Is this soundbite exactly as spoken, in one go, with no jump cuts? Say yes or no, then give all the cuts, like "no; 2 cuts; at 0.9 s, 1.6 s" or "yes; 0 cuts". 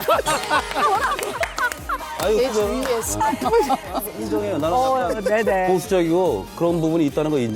no; 1 cut; at 4.1 s